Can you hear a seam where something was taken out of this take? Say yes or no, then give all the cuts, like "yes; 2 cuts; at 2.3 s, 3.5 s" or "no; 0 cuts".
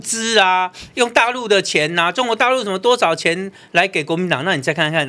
no; 0 cuts